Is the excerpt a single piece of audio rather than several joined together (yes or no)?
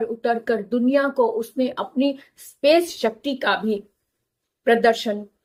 yes